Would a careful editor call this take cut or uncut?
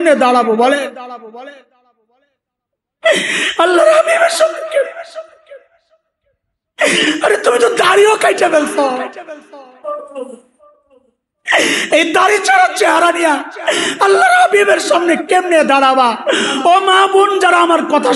uncut